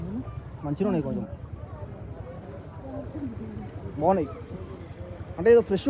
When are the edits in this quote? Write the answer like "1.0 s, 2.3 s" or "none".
none